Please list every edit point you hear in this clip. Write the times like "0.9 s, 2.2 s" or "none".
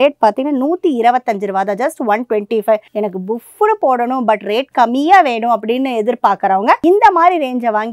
none